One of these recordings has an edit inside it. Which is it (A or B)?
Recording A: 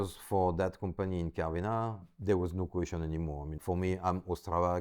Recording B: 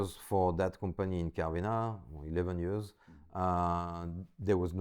A